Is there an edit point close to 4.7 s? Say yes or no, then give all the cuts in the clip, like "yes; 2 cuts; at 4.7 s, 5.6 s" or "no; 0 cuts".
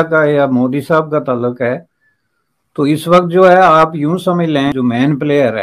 yes; 1 cut; at 4.7 s